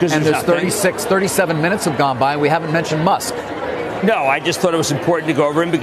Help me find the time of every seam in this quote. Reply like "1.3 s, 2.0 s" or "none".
none